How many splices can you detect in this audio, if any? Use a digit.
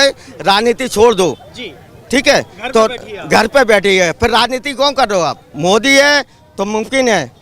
1